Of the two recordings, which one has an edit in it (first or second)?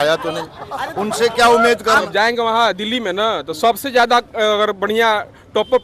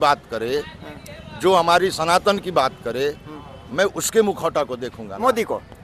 first